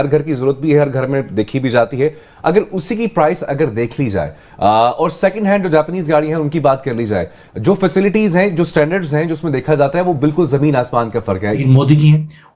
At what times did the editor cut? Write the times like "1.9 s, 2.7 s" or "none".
11.6 s